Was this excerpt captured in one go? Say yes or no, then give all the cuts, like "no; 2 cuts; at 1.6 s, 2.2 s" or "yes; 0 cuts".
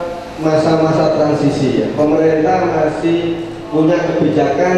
yes; 0 cuts